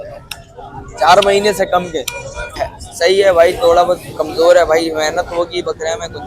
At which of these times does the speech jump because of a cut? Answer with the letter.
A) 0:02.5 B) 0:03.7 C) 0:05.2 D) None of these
A